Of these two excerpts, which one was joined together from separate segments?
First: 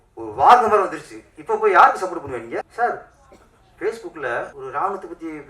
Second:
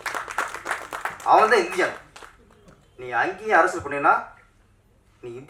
first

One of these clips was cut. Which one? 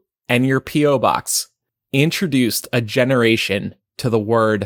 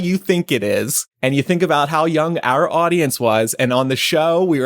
second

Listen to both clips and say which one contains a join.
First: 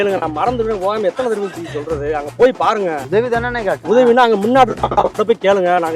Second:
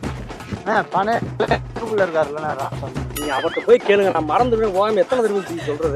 first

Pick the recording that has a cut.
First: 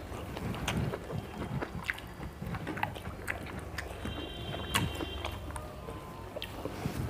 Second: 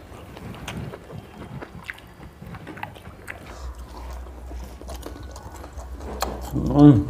second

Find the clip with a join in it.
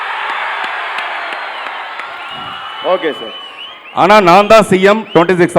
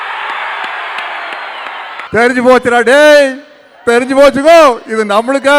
second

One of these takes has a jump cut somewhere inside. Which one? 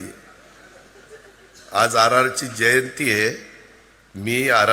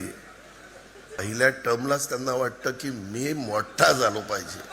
second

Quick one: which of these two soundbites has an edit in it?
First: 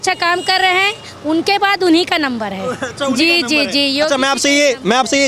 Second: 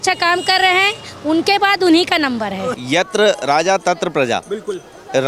second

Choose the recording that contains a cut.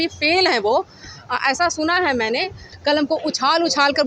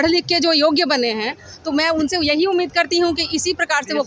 first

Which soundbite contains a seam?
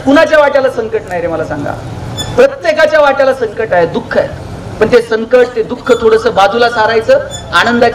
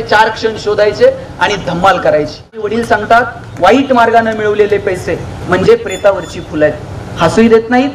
second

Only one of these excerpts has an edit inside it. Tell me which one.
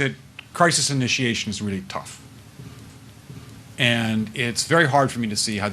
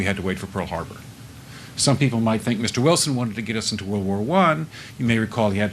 first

